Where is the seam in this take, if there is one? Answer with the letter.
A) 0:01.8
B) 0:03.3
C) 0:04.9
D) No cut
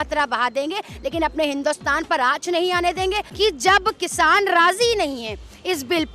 B